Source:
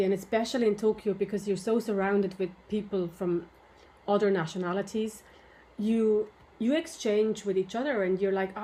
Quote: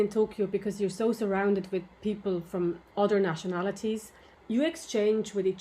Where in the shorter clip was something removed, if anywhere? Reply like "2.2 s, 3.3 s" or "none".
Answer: 2.8 s, 4.3 s